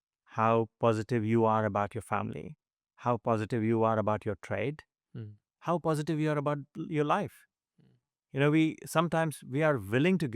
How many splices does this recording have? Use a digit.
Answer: 0